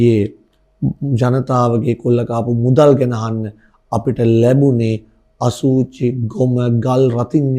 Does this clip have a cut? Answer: no; 0 cuts

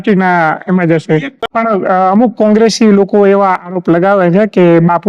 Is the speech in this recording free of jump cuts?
no; 1 cut; at 1.4 s

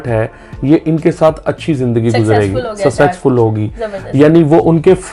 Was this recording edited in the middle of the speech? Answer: no; 0 cuts

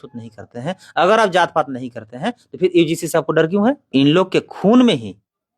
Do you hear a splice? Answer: yes; 1 cut; at 3.9 s

